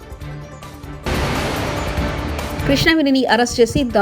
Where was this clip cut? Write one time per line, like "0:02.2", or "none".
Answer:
none